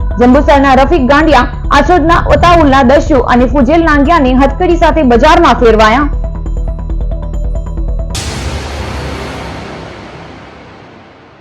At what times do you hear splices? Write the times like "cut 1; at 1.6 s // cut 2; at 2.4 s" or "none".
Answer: cut 1; at 8.1 s